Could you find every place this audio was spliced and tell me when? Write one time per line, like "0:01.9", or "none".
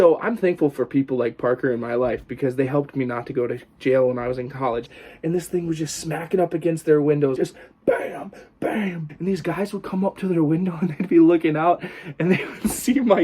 0:04.9
0:07.3
0:09.0